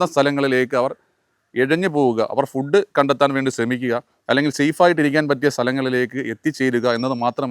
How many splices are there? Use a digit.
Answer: 0